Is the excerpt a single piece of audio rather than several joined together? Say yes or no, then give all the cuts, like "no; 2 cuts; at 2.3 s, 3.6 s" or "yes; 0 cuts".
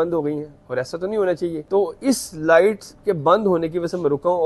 no; 1 cut; at 1.6 s